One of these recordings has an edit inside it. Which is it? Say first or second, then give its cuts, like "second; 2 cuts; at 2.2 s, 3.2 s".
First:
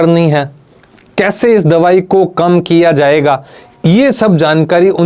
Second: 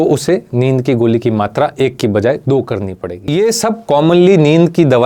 second; 1 cut; at 3.3 s